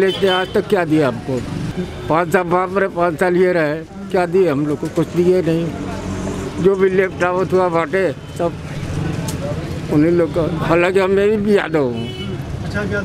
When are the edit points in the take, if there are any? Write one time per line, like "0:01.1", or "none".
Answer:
0:01.7